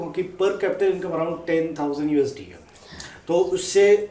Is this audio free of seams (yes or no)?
yes